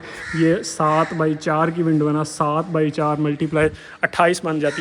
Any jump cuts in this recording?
no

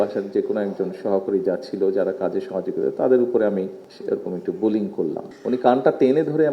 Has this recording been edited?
yes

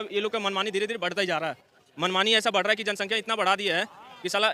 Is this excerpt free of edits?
yes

